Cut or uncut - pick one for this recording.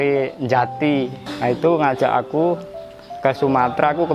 cut